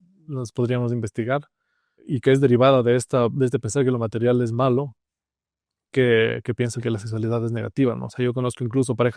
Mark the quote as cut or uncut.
cut